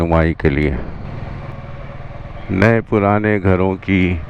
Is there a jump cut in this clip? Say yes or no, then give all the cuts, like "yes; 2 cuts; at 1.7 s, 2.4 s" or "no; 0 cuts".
yes; 1 cut; at 1.4 s